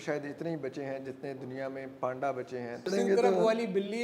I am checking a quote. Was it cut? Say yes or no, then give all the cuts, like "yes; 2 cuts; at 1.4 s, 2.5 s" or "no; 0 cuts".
yes; 1 cut; at 2.9 s